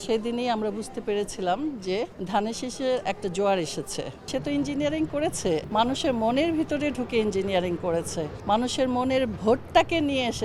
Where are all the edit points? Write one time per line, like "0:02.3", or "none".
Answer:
0:02.2
0:04.3
0:05.7
0:08.3